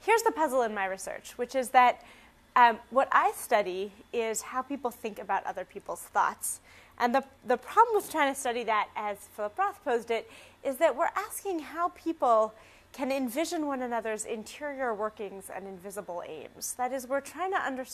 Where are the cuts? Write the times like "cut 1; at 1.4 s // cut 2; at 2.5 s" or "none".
cut 1; at 16.0 s